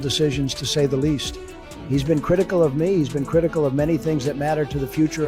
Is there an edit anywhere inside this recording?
no; 0 cuts

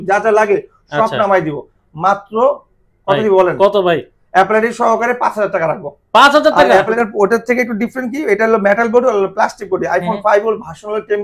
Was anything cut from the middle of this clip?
yes; 1 cut; at 7.0 s

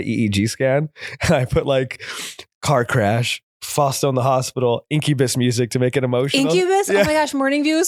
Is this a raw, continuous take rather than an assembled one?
yes; 0 cuts

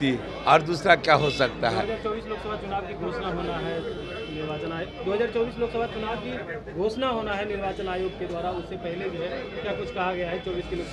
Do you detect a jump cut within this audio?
no; 0 cuts

